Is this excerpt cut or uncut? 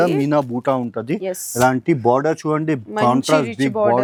uncut